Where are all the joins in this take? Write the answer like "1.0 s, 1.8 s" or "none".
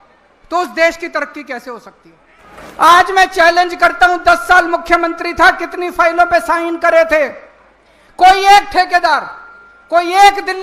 2.6 s